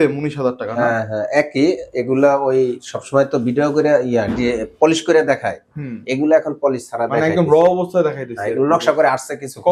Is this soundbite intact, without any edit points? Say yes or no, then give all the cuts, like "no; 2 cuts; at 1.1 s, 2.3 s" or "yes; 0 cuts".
yes; 0 cuts